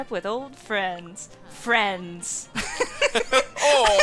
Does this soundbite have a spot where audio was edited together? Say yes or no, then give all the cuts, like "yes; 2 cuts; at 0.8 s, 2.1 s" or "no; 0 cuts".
no; 0 cuts